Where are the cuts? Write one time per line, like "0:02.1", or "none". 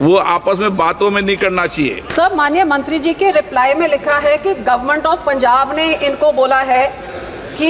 0:02.1